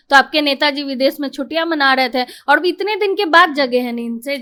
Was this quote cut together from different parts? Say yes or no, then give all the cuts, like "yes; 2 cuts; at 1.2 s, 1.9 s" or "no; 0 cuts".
no; 0 cuts